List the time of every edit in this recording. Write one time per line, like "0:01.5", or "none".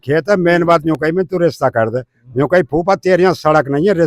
none